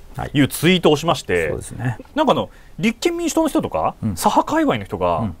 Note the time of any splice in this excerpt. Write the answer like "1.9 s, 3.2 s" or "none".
1.9 s

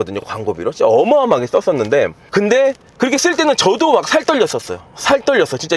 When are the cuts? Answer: none

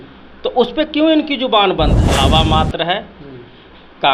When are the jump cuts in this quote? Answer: 2.0 s

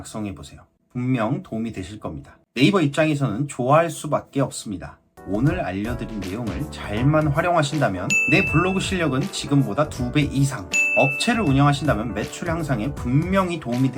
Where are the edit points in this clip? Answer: 2.4 s, 5.1 s

